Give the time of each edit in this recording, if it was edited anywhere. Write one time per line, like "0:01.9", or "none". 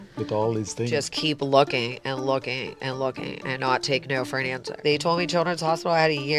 0:00.9
0:04.7